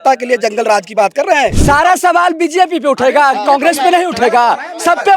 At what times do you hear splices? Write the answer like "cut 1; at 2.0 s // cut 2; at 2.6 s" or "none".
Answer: cut 1; at 1.6 s